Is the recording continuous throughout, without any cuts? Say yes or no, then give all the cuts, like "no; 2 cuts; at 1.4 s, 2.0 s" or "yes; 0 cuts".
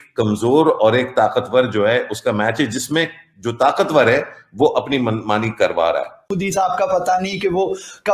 no; 1 cut; at 6.3 s